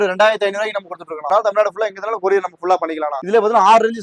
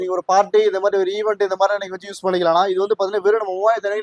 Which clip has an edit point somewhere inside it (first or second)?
first